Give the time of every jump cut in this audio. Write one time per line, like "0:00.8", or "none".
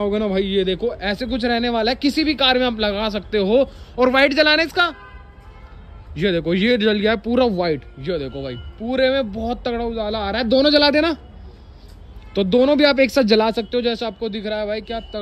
none